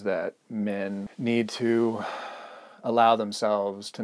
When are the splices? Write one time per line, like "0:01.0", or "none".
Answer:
0:01.0